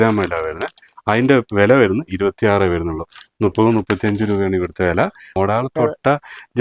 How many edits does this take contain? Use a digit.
1